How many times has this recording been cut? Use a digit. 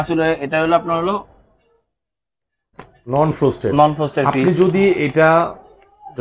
0